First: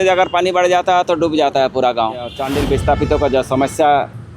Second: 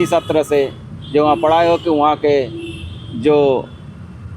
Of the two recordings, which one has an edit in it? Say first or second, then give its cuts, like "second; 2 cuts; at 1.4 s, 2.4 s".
first; 1 cut; at 2.4 s